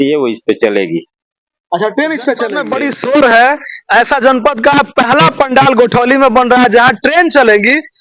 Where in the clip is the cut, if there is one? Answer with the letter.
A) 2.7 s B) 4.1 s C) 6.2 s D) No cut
A